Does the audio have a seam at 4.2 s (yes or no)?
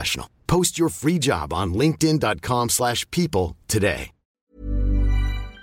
yes